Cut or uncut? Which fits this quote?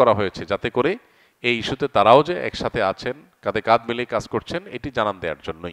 uncut